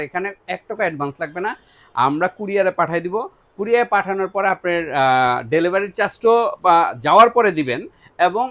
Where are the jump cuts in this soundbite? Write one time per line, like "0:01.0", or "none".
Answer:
none